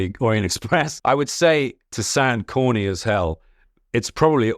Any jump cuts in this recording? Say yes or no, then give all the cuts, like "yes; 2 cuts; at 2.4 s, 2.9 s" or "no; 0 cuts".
yes; 1 cut; at 0.9 s